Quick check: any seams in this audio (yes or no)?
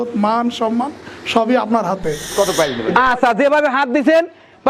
yes